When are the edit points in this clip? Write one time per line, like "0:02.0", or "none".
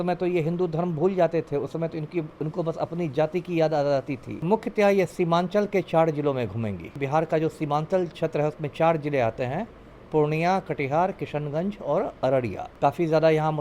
0:04.4
0:07.0
0:12.6